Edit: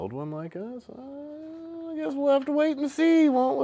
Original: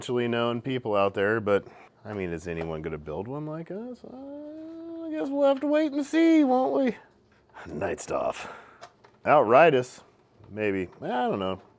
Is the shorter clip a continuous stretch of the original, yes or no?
yes